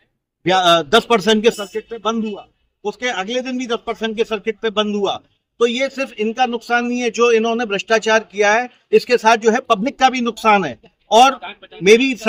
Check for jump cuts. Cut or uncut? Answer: uncut